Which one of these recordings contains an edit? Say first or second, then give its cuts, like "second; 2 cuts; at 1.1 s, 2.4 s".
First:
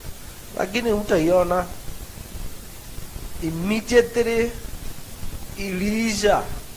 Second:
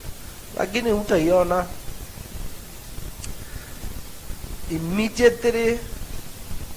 first; 1 cut; at 3.1 s